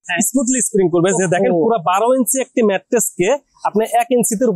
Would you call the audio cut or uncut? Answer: uncut